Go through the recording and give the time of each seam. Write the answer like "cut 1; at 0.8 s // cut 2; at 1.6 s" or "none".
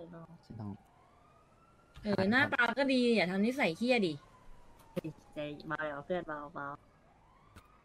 none